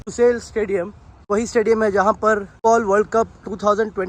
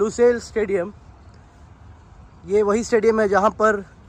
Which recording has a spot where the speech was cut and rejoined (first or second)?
first